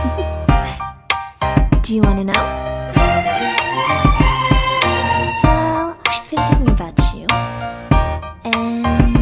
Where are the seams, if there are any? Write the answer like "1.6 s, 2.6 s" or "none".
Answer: none